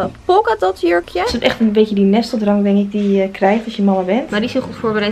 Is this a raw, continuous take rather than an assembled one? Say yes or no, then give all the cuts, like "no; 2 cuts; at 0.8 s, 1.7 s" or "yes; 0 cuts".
no; 2 cuts; at 1.3 s, 4.3 s